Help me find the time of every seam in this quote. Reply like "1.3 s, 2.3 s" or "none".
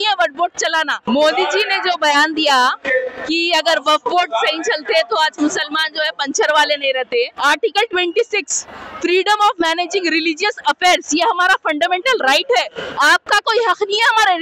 1.0 s, 7.3 s